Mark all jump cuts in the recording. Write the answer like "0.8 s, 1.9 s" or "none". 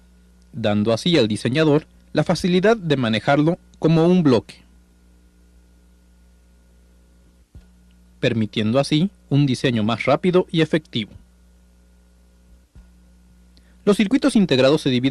none